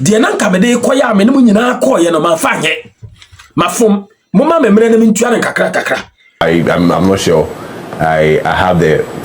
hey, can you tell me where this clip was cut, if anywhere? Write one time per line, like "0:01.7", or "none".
0:06.4